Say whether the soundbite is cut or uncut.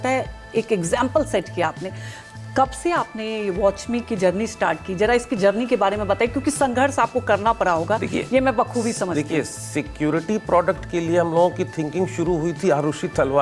uncut